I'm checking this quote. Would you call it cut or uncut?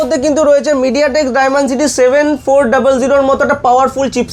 uncut